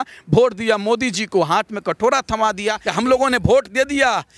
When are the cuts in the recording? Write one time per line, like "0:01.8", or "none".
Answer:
0:02.8